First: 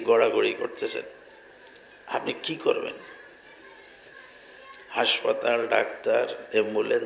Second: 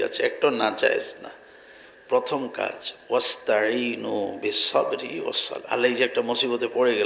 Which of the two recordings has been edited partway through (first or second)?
second